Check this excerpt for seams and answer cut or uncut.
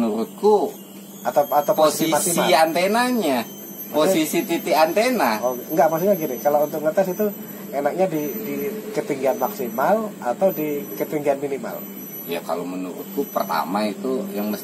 uncut